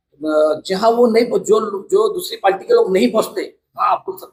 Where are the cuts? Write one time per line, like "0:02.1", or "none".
none

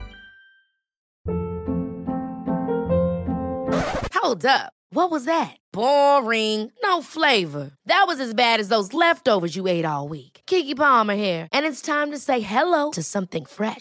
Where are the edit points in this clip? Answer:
0:01.1

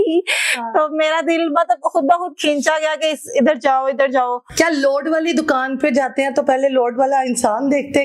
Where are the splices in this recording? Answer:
none

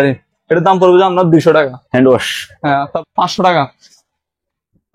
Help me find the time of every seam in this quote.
0:02.9

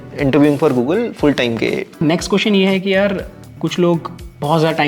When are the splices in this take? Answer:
0:02.0

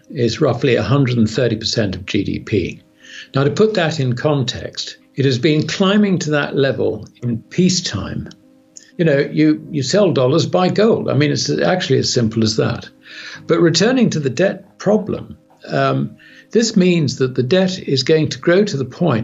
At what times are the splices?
0:08.8

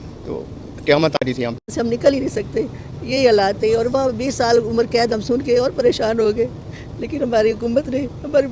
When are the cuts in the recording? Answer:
0:01.7

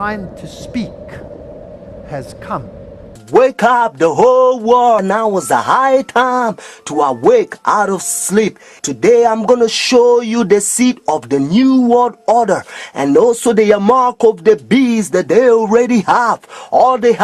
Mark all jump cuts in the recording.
0:06.8

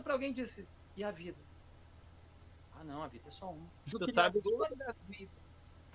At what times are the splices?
0:03.9

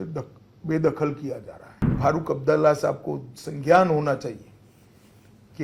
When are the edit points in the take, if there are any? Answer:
0:01.9

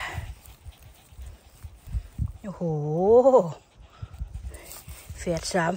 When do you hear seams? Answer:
none

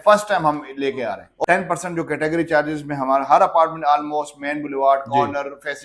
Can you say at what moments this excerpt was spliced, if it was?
0:01.3

